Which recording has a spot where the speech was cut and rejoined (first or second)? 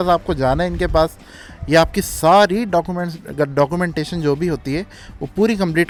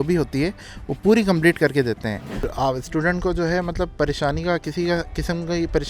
second